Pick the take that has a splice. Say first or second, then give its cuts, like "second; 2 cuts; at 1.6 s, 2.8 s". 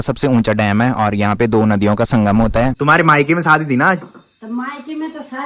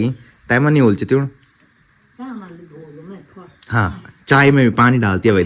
first; 1 cut; at 2.8 s